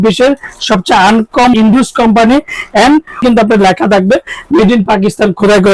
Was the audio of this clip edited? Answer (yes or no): yes